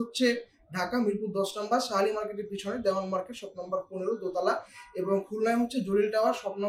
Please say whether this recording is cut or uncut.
uncut